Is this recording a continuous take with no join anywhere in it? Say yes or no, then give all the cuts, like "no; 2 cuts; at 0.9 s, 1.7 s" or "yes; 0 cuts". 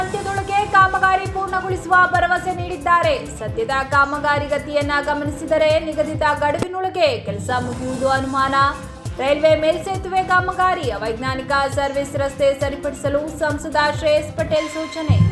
yes; 0 cuts